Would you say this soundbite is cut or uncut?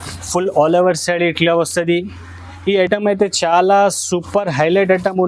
uncut